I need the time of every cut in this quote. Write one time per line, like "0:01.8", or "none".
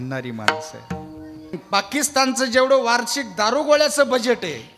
0:01.5